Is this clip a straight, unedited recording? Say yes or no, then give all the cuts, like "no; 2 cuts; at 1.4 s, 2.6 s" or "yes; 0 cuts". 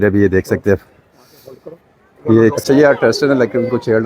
no; 1 cut; at 2.6 s